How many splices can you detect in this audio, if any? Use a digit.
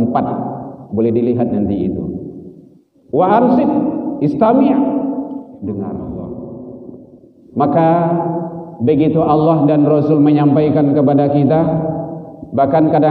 1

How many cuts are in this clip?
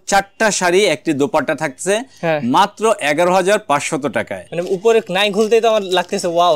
1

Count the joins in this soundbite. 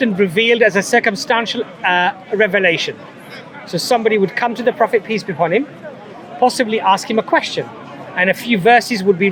0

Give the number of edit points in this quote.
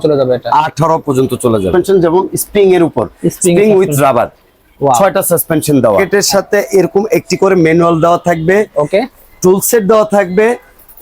2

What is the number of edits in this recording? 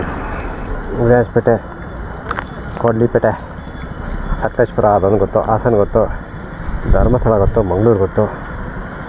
0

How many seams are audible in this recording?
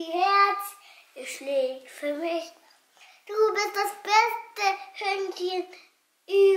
0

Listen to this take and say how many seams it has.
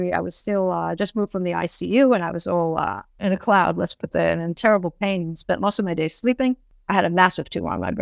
2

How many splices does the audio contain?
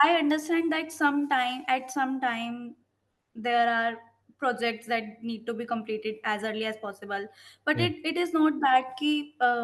0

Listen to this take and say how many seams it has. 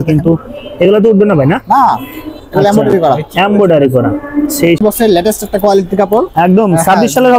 1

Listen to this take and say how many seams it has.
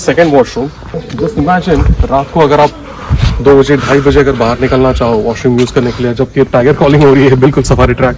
1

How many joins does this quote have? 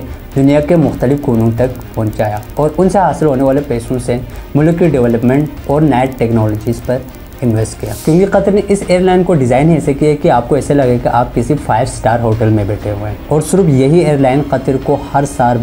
1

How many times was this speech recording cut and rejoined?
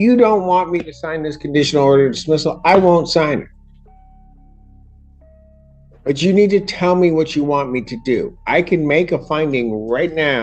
0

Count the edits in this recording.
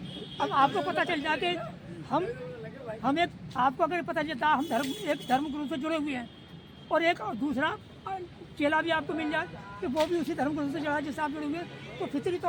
0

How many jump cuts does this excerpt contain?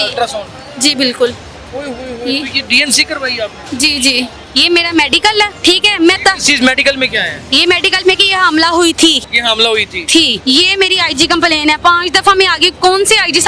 4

